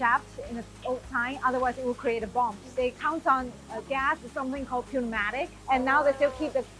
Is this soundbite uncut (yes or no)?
no